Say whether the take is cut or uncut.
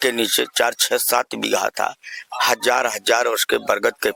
uncut